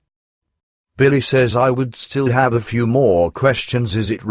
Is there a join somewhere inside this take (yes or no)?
yes